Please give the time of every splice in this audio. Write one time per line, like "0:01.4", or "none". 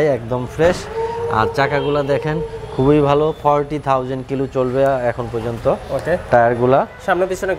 none